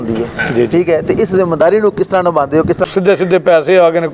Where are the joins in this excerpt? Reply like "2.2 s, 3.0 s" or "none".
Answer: 2.8 s